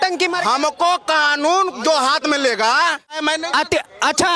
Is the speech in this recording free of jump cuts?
no; 1 cut; at 3.2 s

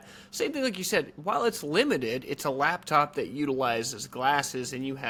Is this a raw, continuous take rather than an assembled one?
yes; 0 cuts

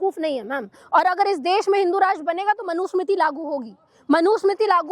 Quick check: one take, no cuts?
yes; 0 cuts

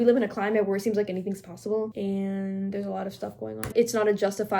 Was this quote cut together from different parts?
yes; 2 cuts; at 1.9 s, 3.7 s

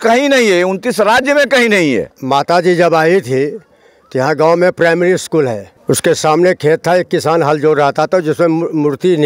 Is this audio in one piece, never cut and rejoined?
no; 2 cuts; at 2.0 s, 5.7 s

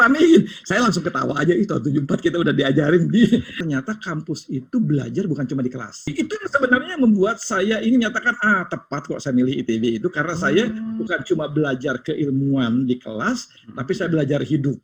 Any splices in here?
yes; 2 cuts; at 3.5 s, 6.1 s

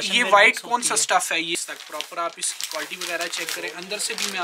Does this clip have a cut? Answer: yes; 1 cut; at 1.5 s

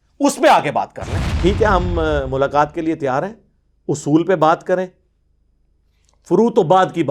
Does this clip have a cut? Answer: yes; 1 cut; at 1.3 s

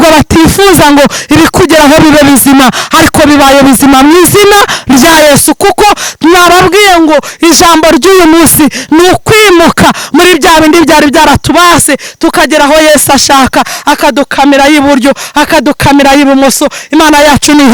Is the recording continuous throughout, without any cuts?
yes; 0 cuts

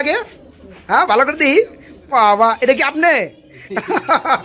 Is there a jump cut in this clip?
no; 0 cuts

